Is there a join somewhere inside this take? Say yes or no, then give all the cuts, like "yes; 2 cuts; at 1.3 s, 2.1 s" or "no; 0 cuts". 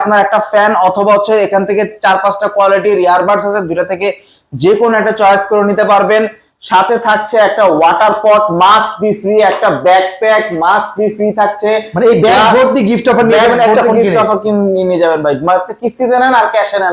no; 0 cuts